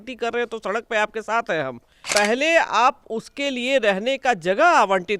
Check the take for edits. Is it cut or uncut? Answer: cut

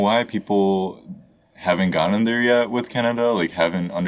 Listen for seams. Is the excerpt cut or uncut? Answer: uncut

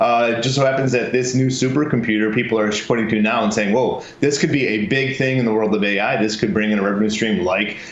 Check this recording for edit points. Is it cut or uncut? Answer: uncut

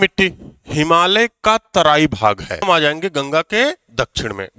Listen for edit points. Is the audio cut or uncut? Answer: cut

